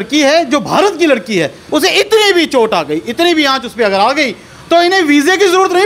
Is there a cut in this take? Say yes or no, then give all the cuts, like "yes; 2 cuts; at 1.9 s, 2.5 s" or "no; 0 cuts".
yes; 1 cut; at 1.6 s